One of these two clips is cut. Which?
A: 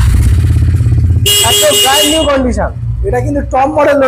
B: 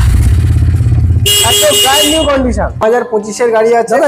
B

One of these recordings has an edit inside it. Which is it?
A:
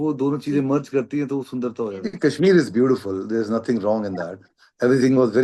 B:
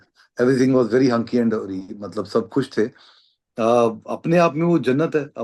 A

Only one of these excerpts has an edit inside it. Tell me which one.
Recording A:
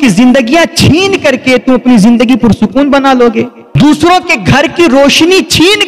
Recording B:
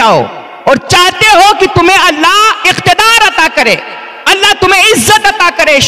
A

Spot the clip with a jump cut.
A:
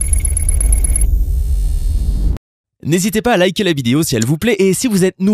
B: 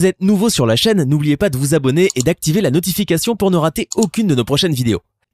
B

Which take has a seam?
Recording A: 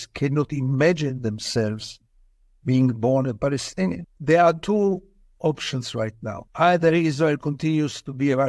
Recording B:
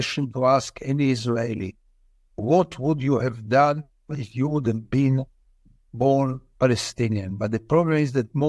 A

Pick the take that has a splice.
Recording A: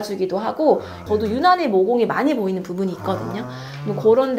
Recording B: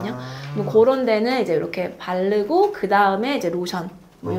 A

